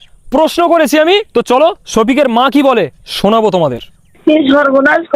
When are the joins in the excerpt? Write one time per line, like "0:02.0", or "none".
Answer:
0:01.3
0:04.1